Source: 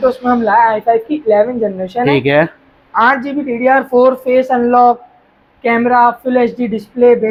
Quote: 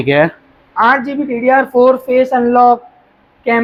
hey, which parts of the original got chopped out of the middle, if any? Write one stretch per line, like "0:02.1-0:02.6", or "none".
none

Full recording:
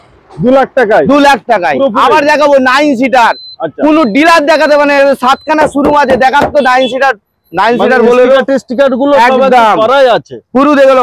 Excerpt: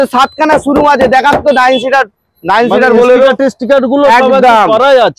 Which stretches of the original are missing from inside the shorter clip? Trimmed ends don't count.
none

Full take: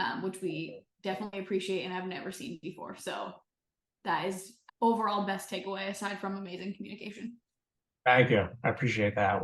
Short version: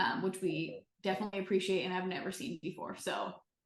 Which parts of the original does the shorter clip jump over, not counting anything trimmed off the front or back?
none

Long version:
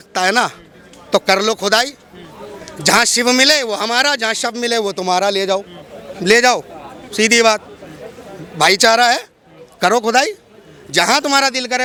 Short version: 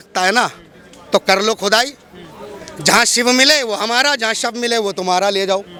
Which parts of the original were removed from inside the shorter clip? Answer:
none

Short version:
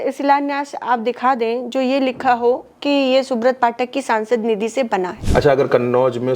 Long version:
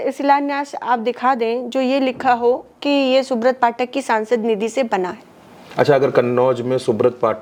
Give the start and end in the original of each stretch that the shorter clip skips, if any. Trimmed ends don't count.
0:05.2-0:05.6

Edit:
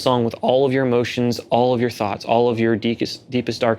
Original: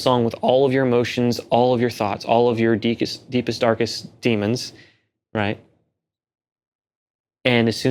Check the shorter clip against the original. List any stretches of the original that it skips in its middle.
none

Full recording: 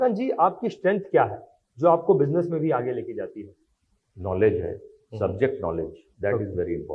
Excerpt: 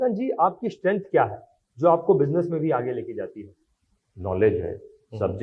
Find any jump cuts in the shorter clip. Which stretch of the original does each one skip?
none

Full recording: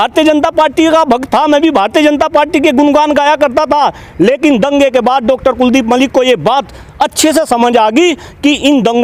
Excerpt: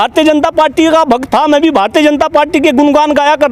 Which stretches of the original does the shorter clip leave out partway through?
none

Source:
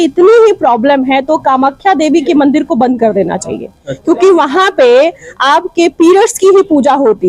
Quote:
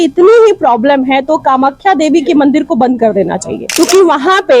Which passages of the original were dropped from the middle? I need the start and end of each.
0:03.6-0:03.9

